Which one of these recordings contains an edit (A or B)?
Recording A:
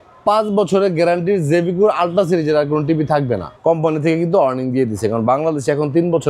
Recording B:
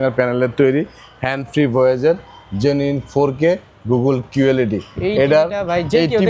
A